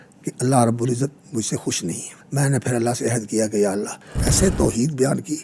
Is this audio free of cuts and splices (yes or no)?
no